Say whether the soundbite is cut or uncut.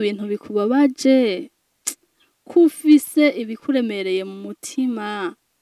uncut